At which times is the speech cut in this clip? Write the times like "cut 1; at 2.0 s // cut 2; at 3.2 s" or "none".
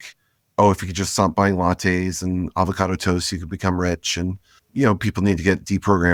none